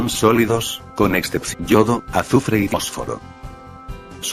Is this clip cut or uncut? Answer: uncut